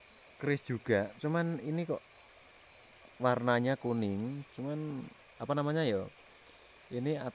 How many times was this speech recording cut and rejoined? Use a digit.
0